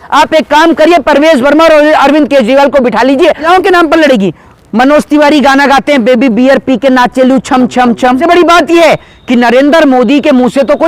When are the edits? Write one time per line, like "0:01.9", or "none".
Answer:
0:03.4
0:08.2

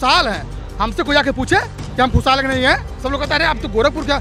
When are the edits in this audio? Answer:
0:02.9

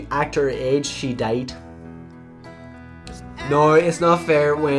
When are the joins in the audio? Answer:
none

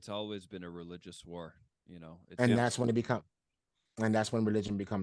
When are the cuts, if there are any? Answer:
none

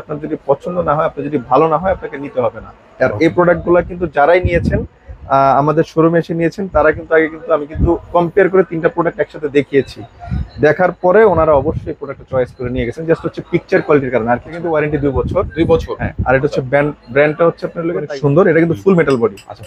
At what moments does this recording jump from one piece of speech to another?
0:14.7
0:18.0

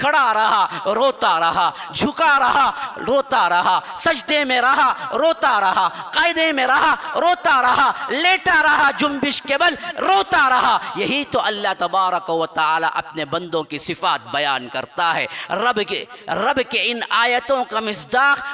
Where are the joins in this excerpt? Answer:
none

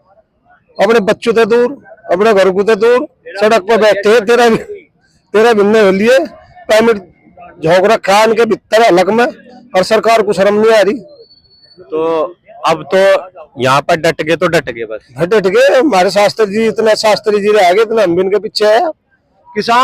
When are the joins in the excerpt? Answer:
none

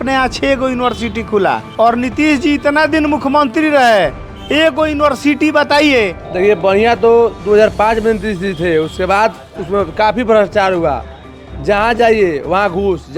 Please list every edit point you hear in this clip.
0:01.7
0:06.2

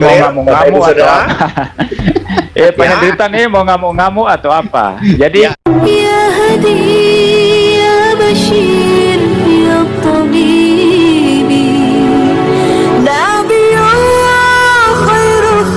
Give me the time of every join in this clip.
0:05.6

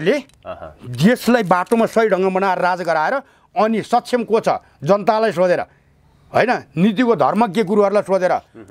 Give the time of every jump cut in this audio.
none

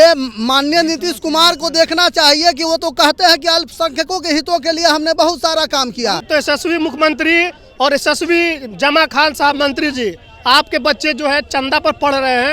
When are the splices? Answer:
0:06.3

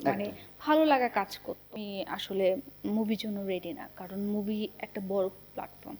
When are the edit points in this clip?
0:01.8

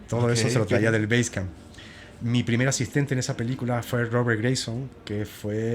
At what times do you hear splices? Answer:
none

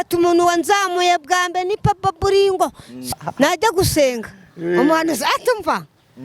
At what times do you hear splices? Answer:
0:03.0

